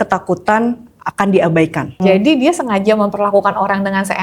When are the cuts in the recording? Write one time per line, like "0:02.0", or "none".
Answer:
0:02.0

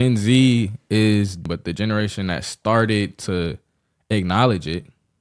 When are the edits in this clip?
0:01.4

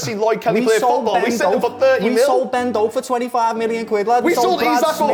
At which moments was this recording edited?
none

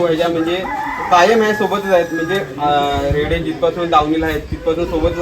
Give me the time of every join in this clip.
none

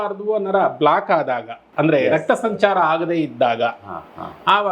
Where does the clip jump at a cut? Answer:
0:01.6

